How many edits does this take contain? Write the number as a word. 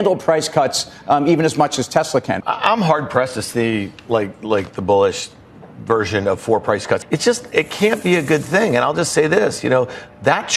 two